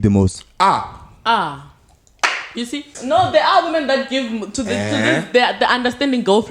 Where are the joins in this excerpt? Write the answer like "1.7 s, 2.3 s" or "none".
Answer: 2.9 s